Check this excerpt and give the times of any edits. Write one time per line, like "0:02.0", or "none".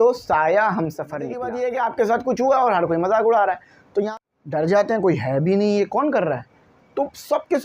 0:01.4
0:04.1